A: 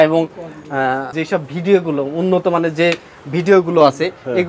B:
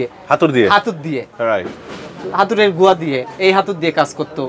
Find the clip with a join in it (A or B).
A